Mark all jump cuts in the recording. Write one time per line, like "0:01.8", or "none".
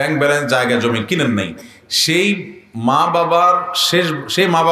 none